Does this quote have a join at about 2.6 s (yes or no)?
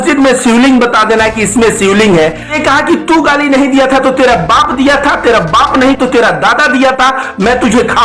yes